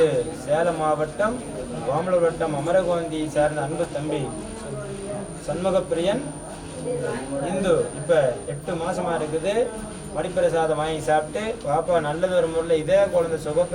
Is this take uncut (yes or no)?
yes